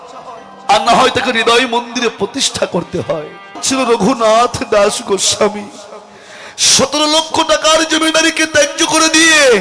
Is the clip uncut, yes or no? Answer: no